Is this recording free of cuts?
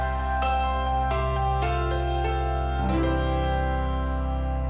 yes; 0 cuts

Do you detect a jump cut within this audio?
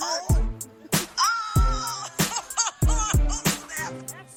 no; 0 cuts

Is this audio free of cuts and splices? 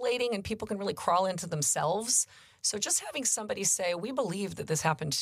yes; 0 cuts

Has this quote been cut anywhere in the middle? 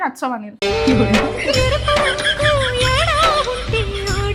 no; 0 cuts

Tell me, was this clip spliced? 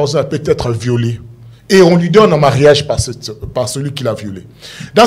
no; 0 cuts

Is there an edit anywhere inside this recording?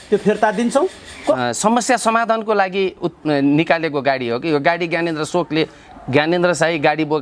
yes; 1 cut; at 1.4 s

